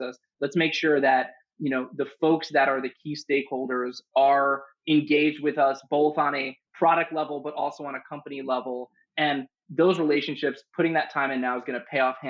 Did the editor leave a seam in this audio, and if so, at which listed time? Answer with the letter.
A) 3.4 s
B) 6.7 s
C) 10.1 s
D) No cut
D